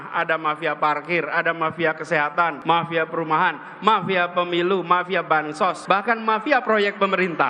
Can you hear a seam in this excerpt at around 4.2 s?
no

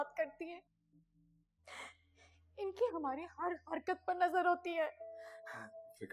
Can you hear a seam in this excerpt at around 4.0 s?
no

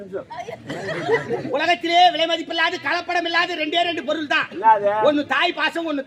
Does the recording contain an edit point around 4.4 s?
no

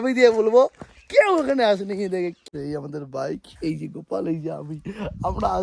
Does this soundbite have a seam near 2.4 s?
yes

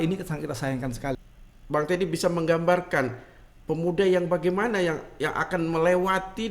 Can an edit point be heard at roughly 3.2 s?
no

